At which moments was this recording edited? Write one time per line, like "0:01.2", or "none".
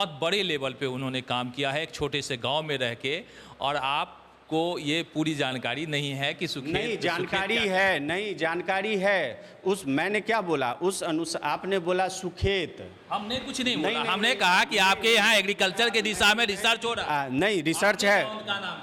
none